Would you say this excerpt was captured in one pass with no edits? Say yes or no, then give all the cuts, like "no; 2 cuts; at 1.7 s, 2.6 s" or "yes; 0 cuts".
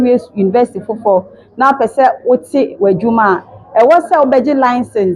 yes; 0 cuts